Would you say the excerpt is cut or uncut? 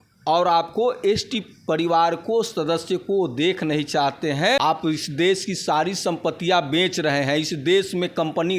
cut